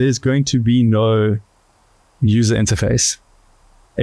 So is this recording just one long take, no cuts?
yes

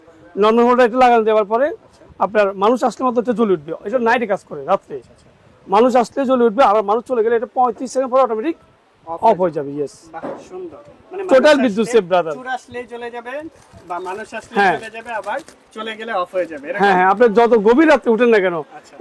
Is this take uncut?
yes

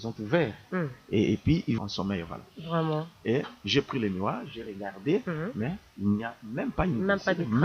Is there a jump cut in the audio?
yes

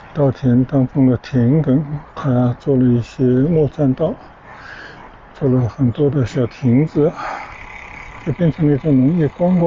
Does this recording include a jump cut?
no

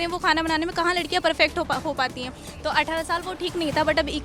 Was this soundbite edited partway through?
no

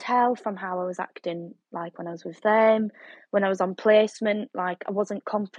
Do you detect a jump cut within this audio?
no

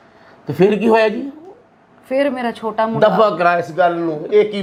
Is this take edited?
no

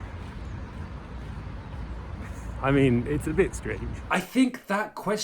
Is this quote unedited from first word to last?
no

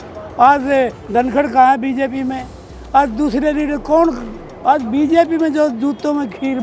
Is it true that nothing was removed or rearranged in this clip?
yes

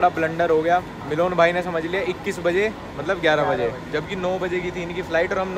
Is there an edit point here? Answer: no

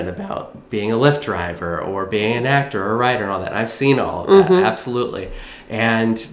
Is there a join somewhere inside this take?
no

